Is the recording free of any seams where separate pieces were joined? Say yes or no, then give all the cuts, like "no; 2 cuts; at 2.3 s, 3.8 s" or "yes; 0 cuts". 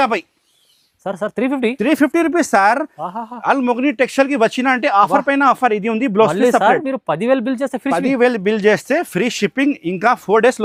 yes; 0 cuts